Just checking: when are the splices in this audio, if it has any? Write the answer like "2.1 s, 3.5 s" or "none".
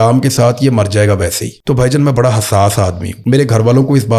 1.5 s, 3.1 s